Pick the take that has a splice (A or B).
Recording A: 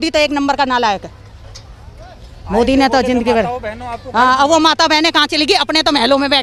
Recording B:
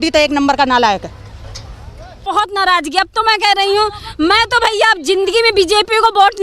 B